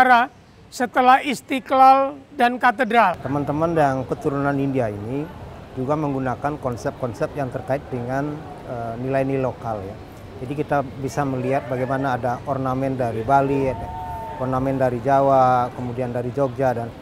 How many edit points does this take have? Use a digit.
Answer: 1